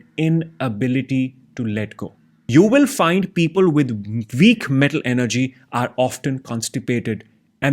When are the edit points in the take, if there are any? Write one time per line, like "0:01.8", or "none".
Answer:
0:02.3